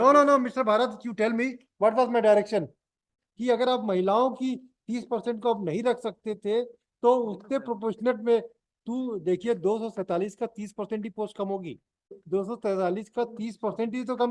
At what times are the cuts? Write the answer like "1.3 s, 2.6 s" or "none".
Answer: 3.1 s, 12.2 s